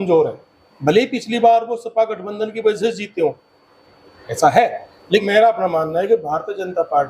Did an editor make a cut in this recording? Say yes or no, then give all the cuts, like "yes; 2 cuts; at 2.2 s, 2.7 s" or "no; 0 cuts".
yes; 1 cut; at 5.2 s